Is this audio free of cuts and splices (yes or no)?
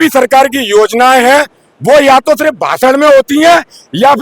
yes